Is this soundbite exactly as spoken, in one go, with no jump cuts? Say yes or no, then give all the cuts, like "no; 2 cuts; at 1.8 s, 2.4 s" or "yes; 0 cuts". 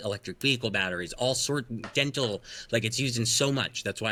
yes; 0 cuts